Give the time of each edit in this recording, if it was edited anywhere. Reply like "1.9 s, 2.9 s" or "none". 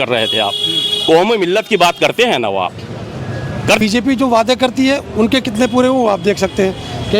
3.8 s